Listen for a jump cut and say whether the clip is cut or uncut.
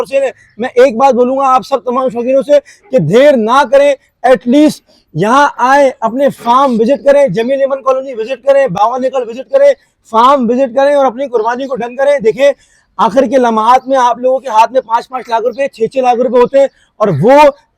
uncut